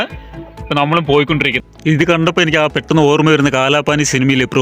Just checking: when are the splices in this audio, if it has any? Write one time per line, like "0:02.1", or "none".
0:01.6